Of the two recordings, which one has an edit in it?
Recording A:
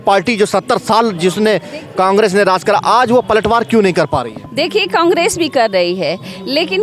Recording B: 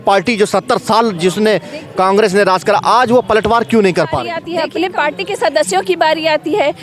B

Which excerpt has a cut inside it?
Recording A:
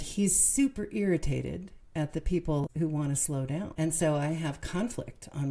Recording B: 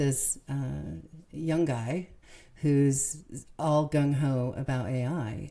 A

